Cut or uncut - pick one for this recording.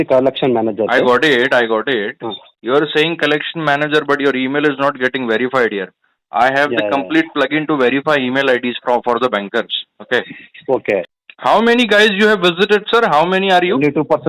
cut